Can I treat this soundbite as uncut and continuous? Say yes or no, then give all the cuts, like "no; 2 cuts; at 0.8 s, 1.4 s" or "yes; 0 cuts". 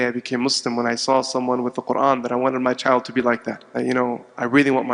no; 1 cut; at 3.6 s